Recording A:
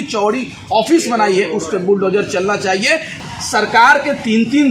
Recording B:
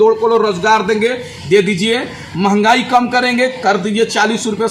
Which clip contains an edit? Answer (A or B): A